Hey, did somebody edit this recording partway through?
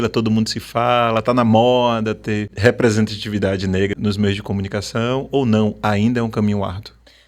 yes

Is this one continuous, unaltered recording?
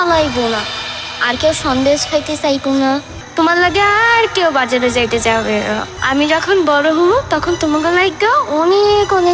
no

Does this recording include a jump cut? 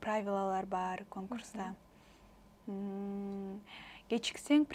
no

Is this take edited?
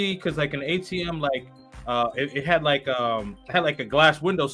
no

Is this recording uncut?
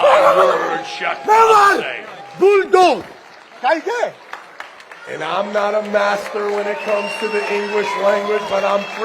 yes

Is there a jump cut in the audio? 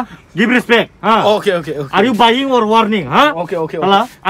no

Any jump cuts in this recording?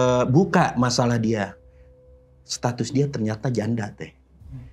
no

